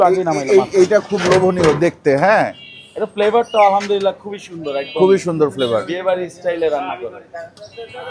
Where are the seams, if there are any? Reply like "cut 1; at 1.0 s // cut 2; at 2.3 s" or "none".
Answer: none